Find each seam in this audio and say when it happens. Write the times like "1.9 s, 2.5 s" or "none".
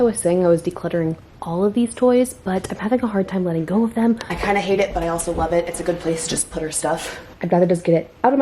4.3 s, 7.3 s

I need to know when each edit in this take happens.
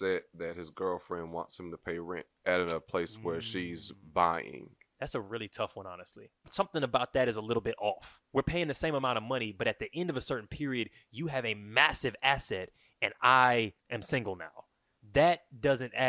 2.3 s, 4.9 s, 6.4 s

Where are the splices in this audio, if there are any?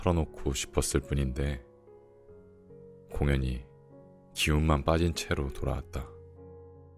6.0 s

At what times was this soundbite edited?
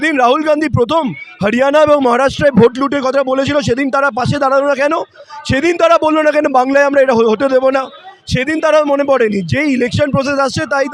none

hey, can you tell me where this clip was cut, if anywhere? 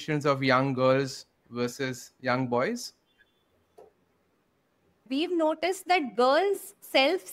5.0 s

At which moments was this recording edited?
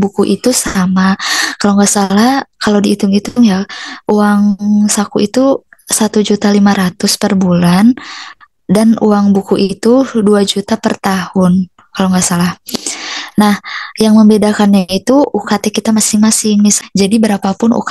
16.8 s

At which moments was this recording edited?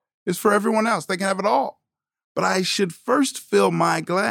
2.7 s

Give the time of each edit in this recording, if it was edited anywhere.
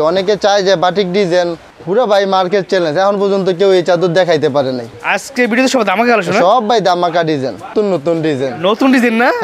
1.6 s, 4.9 s, 7.7 s

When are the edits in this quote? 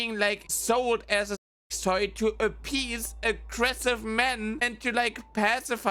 none

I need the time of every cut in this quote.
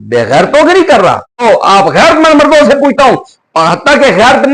1.4 s

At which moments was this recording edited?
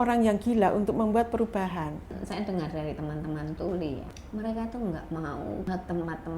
2.1 s, 4.1 s, 5.7 s

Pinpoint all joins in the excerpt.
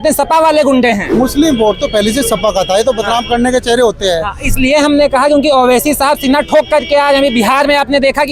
1.1 s

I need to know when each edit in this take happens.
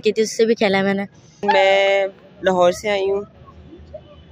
1.4 s

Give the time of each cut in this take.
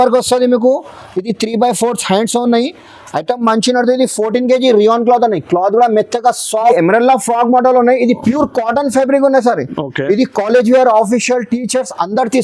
6.7 s

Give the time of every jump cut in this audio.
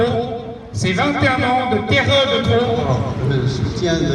2.8 s

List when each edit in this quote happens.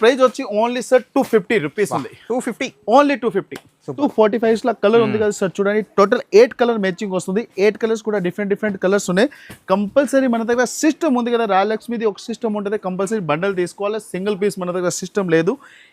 3.8 s

